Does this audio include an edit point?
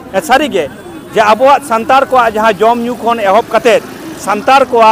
no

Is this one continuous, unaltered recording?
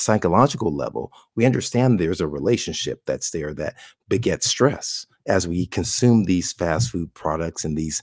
yes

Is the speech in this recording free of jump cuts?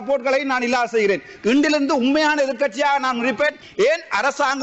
no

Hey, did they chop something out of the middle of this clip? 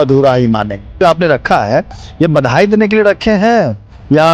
yes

